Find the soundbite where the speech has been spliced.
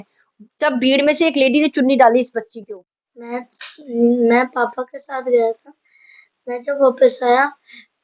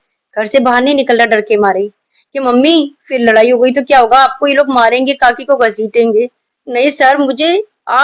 first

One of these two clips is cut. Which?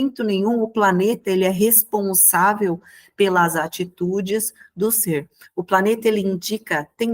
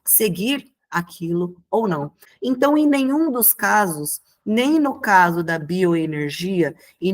second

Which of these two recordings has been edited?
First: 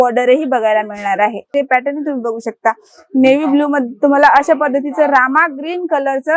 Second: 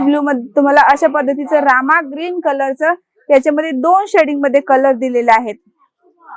first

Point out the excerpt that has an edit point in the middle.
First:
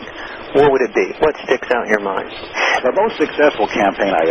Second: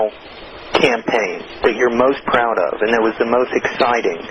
first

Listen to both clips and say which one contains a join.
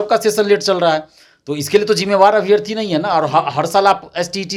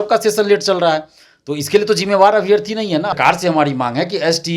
second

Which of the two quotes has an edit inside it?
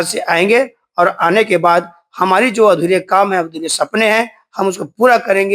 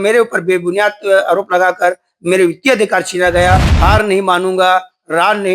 second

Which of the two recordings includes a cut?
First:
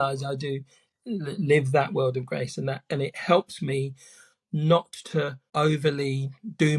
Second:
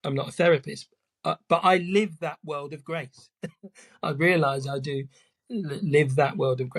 first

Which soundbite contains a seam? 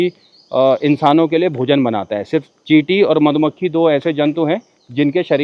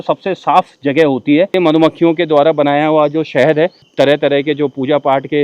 second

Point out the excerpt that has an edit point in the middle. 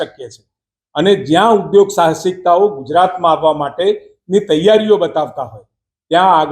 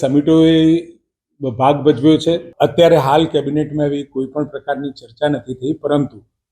second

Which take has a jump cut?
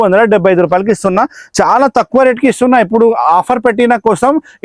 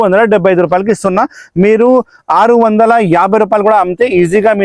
first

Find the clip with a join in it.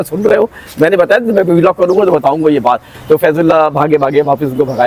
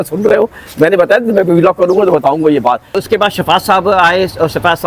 second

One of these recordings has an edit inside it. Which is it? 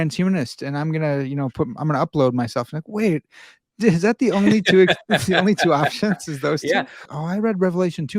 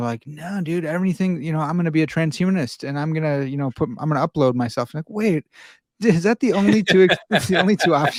first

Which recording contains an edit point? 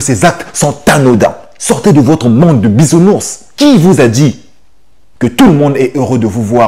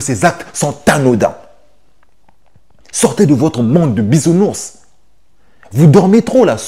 first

